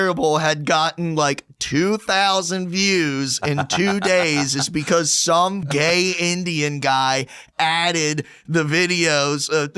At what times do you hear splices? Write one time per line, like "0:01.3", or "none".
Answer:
0:05.6